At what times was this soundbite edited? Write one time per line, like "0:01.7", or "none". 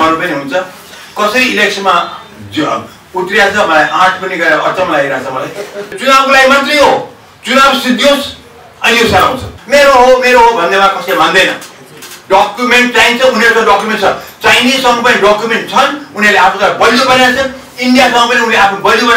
0:06.0
0:09.5

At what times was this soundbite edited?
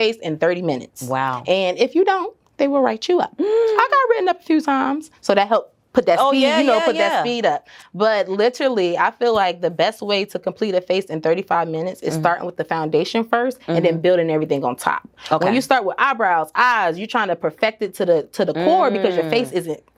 none

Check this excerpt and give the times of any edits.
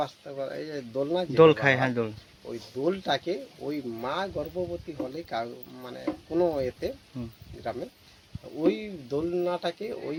none

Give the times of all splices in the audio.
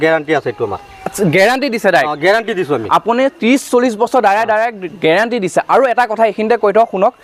none

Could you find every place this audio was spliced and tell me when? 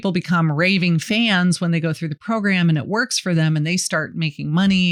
none

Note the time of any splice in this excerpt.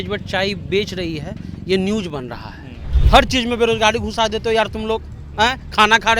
0:02.9

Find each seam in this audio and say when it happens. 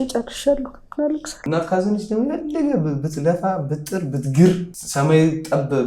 0:01.4
0:04.8

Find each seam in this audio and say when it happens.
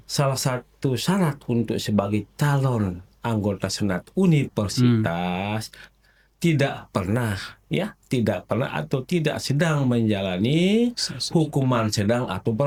none

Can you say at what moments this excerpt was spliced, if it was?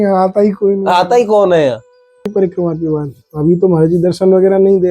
0:02.3

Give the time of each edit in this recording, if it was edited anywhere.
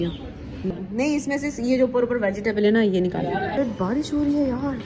0:00.7
0:03.6

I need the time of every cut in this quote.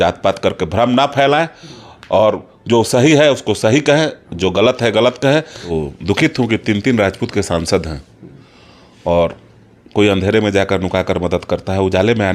0:05.6

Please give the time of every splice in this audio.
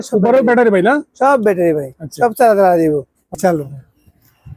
0:03.3

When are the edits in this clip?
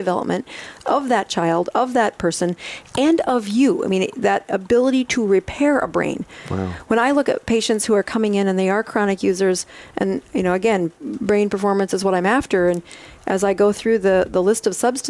0:11.0

